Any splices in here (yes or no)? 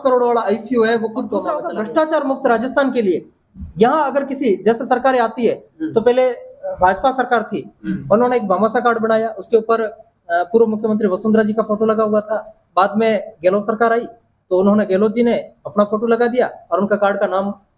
yes